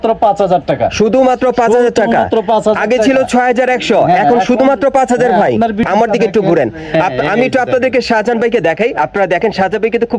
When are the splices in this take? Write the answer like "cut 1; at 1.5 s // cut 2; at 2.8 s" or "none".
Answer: cut 1; at 5.9 s